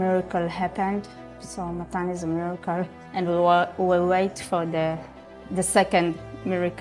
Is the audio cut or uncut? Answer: uncut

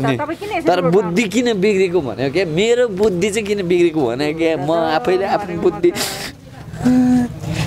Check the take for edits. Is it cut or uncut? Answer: uncut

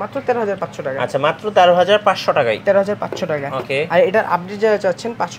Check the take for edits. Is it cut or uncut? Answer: uncut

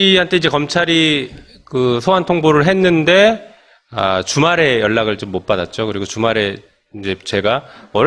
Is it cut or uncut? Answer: uncut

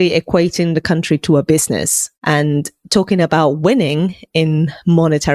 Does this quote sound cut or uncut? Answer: uncut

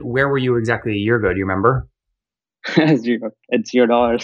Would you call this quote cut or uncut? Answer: uncut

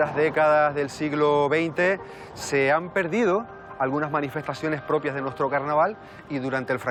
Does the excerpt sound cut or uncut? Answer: uncut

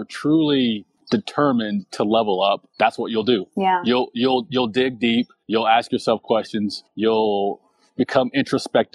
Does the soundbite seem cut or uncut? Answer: cut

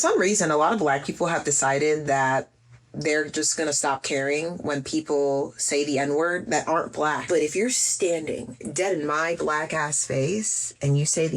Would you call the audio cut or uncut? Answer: cut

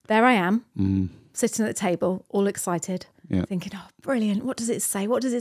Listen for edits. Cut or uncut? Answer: uncut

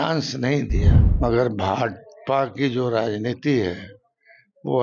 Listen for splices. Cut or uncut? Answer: cut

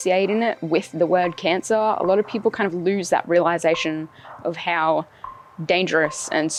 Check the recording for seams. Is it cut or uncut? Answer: uncut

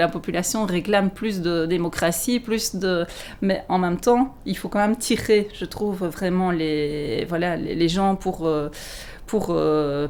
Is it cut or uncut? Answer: uncut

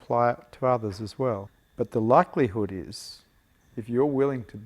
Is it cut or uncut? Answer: cut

